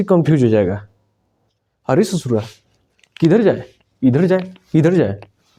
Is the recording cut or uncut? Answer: uncut